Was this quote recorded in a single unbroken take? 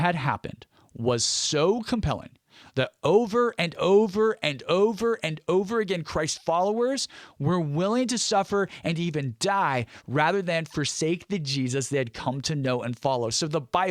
yes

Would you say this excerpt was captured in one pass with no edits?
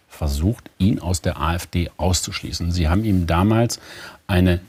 yes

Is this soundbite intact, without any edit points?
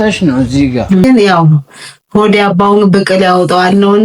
no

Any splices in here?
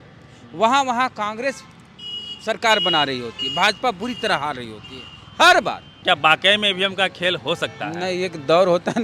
yes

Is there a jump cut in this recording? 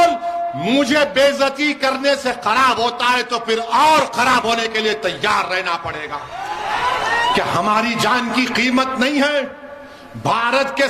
no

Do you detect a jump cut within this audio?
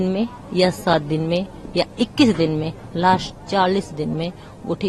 no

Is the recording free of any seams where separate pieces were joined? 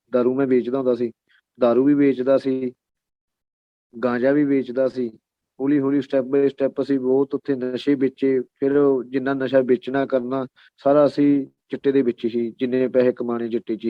yes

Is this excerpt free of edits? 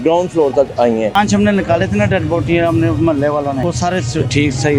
no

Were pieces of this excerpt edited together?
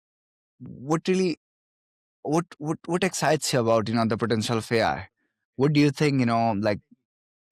no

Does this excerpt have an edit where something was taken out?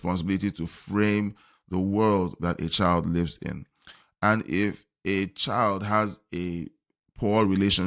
no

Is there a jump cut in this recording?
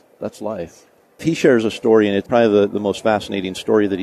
yes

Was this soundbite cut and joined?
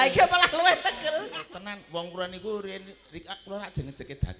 yes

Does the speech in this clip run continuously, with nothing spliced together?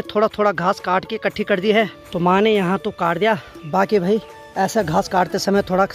yes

